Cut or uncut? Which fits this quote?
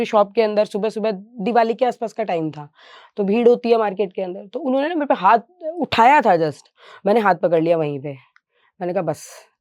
uncut